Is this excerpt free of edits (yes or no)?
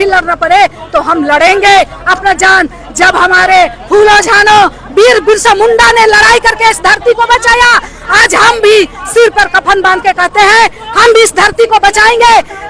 yes